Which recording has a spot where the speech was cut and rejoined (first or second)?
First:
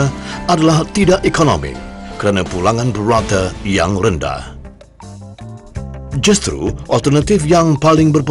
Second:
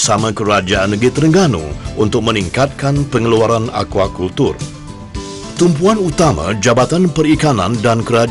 second